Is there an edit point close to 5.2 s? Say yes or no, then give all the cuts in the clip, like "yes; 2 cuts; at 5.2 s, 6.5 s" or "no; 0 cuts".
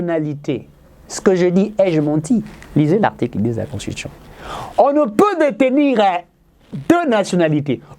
no; 0 cuts